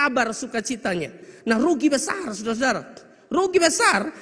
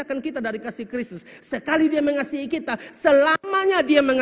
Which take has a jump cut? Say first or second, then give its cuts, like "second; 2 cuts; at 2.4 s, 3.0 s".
first; 1 cut; at 1.3 s